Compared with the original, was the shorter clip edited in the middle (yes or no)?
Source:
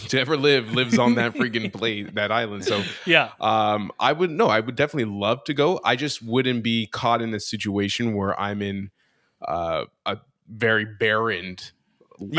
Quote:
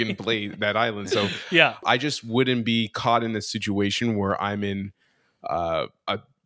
yes